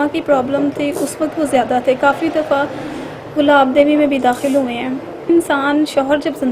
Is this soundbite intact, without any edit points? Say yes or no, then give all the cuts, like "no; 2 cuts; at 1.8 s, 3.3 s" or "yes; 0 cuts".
no; 1 cut; at 5.3 s